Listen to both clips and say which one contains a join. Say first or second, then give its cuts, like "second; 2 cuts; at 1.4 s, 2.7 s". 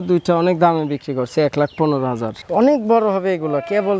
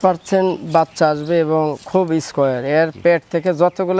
first; 1 cut; at 2.3 s